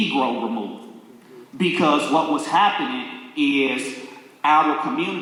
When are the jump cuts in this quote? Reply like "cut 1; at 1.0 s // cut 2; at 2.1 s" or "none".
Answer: none